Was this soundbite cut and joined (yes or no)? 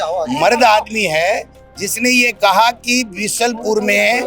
no